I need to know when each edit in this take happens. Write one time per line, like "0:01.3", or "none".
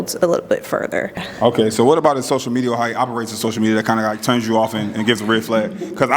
0:01.3